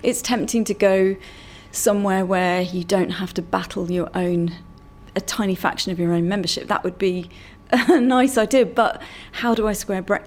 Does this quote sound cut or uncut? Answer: uncut